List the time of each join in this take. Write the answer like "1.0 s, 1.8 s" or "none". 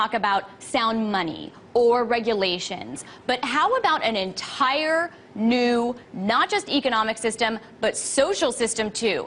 8.0 s